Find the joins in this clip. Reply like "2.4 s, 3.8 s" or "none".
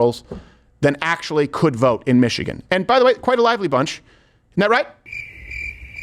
5.0 s